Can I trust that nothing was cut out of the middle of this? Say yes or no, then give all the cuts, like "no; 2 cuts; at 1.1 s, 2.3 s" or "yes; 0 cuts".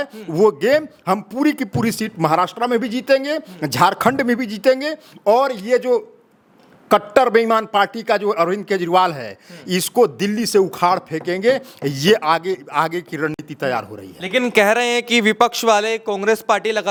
yes; 0 cuts